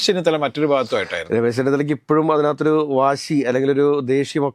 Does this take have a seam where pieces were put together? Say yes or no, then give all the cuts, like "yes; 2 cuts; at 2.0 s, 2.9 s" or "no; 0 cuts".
no; 0 cuts